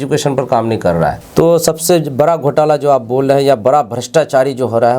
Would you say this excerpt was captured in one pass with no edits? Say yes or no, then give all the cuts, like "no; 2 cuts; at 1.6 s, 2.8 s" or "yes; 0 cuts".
no; 1 cut; at 1.2 s